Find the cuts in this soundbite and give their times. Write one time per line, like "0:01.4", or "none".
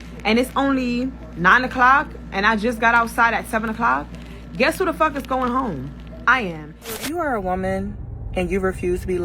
0:07.0